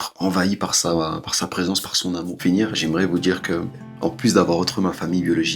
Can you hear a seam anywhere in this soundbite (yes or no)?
yes